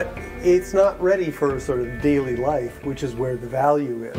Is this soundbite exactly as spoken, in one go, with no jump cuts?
yes; 0 cuts

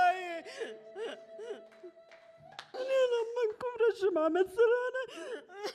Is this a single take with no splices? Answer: no; 1 cut; at 2.8 s

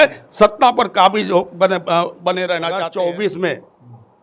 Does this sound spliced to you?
yes; 1 cut; at 2.7 s

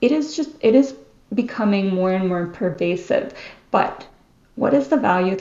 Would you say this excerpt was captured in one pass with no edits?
yes; 0 cuts

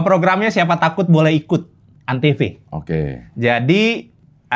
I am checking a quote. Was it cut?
no; 0 cuts

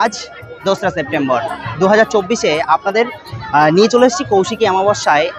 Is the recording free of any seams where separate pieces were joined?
yes; 0 cuts

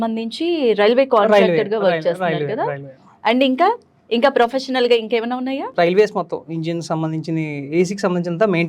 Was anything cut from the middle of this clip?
yes; 1 cut; at 5.7 s

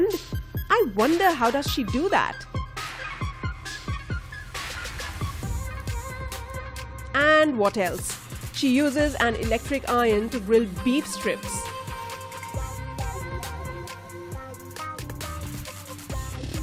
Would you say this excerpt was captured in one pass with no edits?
no; 1 cut; at 9.6 s

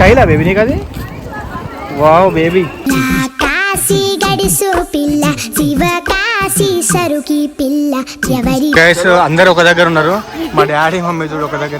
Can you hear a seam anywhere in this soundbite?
yes; 1 cut; at 8.7 s

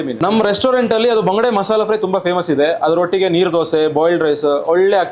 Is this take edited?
no; 0 cuts

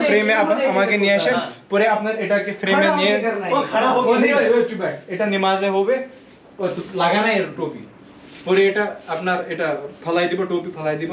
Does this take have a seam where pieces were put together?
no; 0 cuts

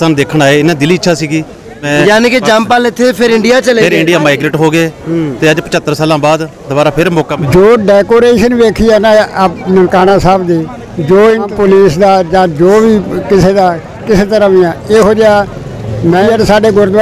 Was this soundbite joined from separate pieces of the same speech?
yes; 4 cuts; at 1.9 s, 7.3 s, 11.5 s, 16.2 s

